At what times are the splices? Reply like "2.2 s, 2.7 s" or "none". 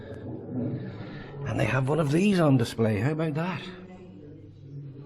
1.0 s